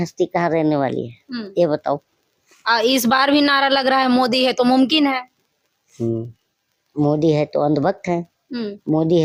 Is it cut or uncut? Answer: uncut